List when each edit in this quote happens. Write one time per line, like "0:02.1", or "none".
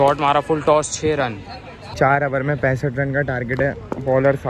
0:01.9

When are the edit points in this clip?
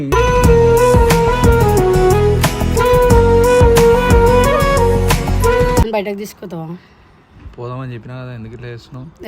0:05.8

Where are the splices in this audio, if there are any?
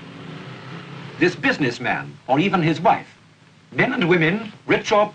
none

